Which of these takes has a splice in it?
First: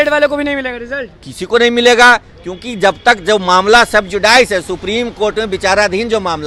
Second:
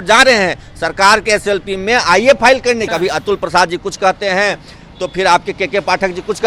second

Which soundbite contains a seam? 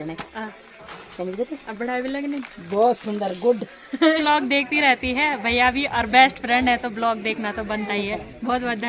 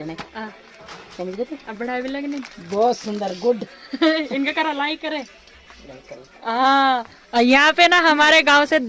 first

